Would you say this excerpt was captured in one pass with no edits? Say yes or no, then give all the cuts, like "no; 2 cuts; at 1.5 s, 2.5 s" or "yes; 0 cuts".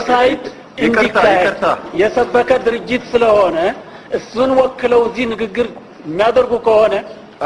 yes; 0 cuts